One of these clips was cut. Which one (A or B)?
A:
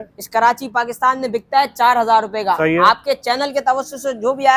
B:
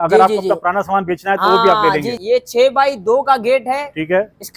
B